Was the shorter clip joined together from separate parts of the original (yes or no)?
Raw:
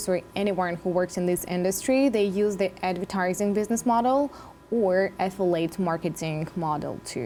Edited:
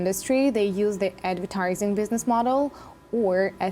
no